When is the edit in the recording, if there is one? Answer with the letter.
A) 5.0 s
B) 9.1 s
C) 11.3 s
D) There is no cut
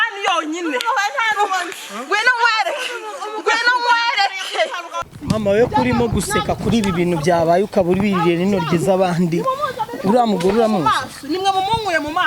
A